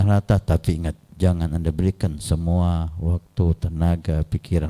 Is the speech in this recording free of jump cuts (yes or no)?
no